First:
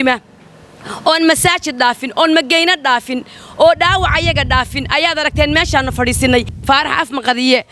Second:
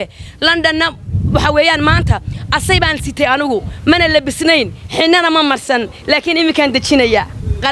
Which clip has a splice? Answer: first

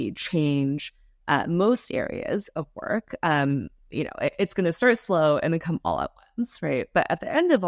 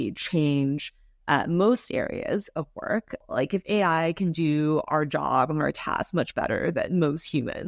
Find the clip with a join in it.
second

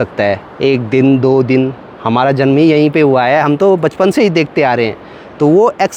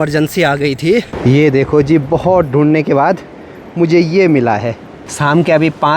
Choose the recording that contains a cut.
second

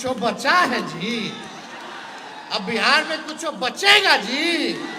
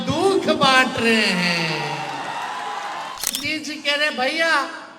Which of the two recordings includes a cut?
second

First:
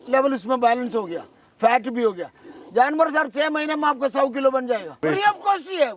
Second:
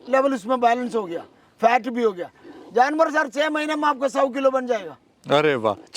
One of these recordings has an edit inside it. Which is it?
first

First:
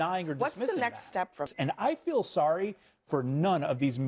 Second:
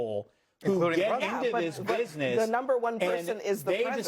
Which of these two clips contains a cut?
first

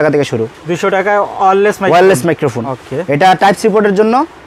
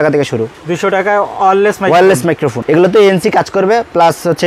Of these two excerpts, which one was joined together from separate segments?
second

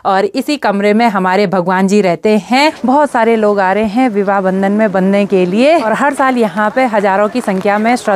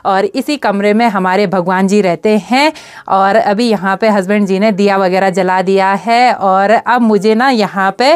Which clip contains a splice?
first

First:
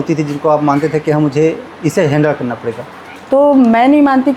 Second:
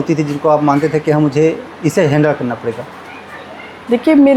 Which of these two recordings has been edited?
first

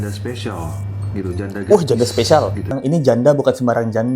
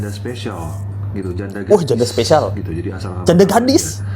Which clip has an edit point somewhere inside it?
first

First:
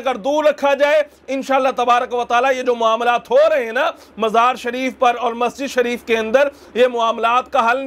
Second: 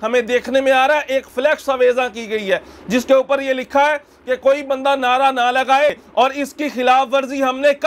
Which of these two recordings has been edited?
second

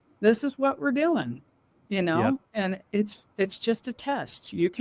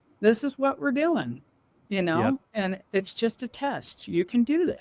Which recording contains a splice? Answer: second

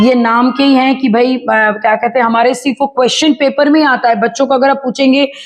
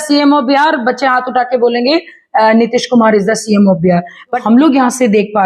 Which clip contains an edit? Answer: second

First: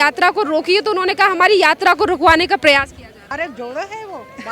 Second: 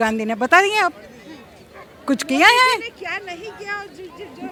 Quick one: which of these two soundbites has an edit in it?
first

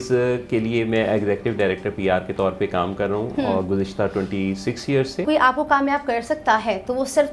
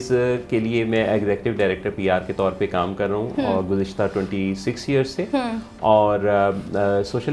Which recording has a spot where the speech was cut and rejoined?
first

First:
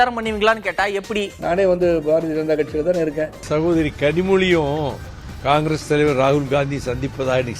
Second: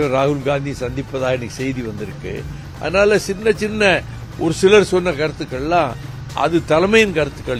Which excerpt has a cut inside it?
first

